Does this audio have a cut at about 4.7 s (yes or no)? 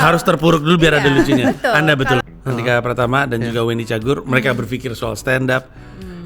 no